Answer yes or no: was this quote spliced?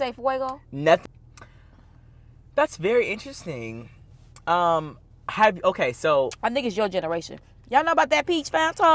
yes